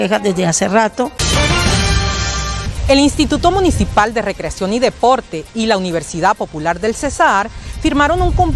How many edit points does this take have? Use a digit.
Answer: 2